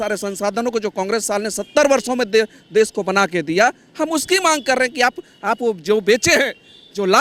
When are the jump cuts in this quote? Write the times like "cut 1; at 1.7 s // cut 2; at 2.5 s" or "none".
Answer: none